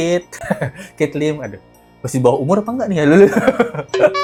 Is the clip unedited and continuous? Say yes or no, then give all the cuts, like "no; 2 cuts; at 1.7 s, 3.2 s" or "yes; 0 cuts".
yes; 0 cuts